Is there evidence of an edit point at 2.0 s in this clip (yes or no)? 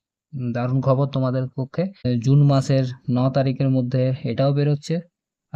yes